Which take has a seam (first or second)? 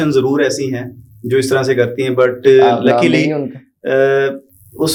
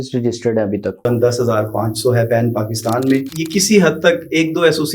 second